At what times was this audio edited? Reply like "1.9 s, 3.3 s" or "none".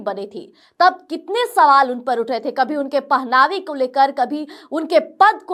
none